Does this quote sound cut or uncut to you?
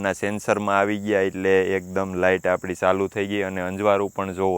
uncut